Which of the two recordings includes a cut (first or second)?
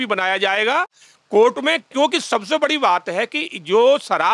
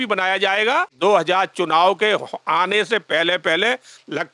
second